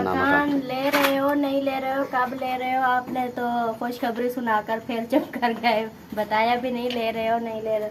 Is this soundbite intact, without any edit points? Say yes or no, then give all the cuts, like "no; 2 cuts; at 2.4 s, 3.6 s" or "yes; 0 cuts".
yes; 0 cuts